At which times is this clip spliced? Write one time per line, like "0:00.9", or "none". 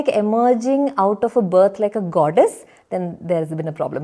none